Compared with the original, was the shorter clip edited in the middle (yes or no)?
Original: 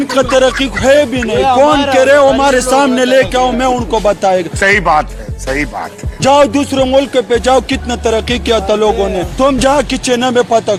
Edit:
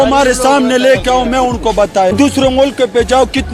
yes